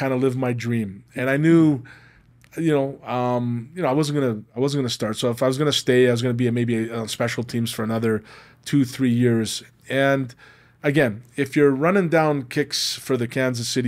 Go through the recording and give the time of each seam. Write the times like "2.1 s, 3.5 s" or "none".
none

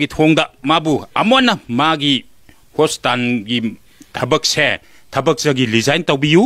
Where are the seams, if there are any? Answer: none

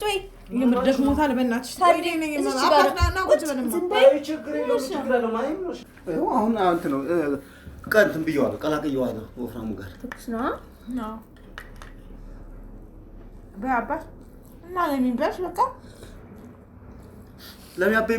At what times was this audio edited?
5.9 s

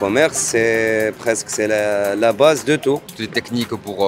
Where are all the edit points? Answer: 3.1 s

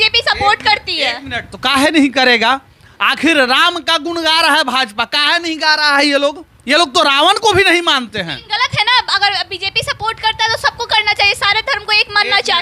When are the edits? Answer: none

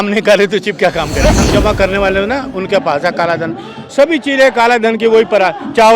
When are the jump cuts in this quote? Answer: 1.3 s

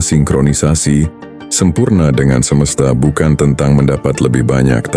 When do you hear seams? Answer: none

